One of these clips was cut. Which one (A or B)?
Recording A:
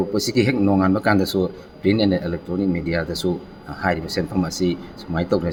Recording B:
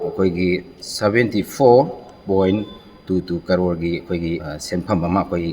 B